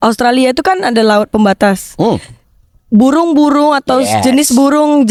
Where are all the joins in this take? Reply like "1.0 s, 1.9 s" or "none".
none